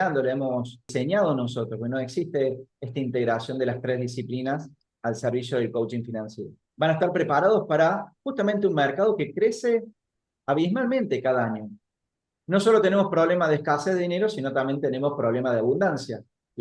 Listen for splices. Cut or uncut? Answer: uncut